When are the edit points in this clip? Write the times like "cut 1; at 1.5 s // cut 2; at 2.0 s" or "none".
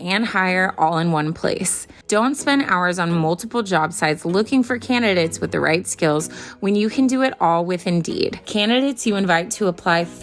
cut 1; at 8.5 s

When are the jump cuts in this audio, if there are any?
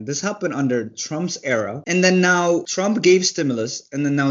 cut 1; at 1.8 s // cut 2; at 2.7 s

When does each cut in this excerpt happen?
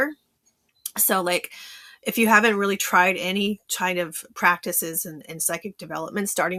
none

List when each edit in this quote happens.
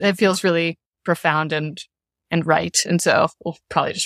none

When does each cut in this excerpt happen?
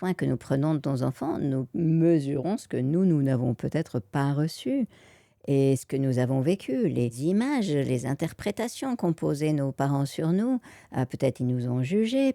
cut 1; at 7.2 s

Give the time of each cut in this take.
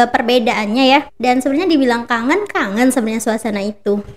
cut 1; at 1.1 s

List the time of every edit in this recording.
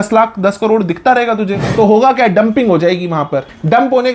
cut 1; at 1.7 s

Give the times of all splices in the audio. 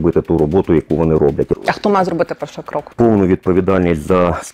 cut 1; at 1.5 s // cut 2; at 2.9 s

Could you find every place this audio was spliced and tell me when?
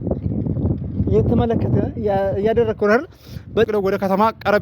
cut 1; at 3.7 s

